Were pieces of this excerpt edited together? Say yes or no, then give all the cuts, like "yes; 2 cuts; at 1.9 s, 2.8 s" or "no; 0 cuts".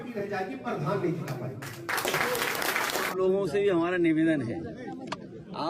yes; 1 cut; at 3.0 s